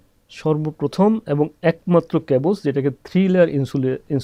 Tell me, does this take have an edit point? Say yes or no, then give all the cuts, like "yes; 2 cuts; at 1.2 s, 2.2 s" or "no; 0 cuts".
no; 0 cuts